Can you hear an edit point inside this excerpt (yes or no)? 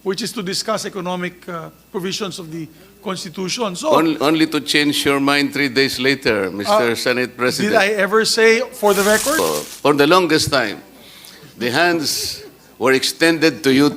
yes